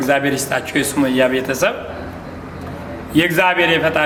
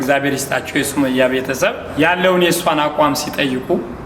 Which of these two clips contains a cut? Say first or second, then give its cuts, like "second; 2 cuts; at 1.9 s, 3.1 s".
second; 1 cut; at 1.8 s